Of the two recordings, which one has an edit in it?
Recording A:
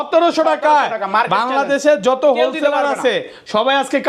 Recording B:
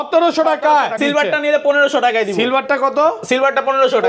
B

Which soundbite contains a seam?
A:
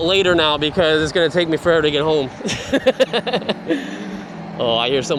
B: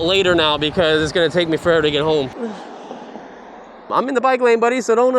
B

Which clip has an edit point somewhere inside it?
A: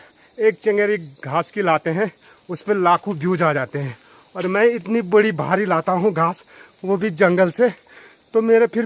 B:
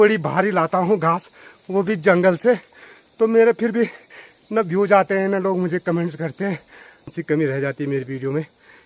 B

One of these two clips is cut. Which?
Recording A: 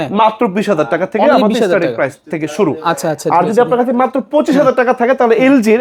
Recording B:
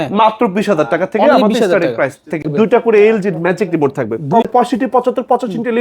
B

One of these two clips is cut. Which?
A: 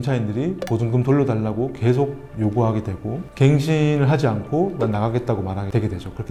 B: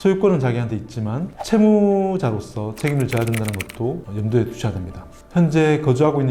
B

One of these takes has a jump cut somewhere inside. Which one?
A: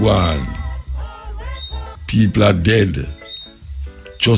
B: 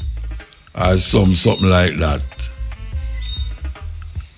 A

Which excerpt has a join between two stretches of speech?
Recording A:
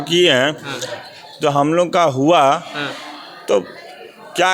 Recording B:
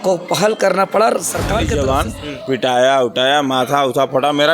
B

